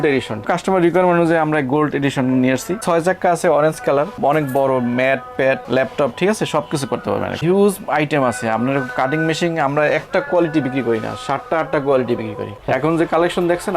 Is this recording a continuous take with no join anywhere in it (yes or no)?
no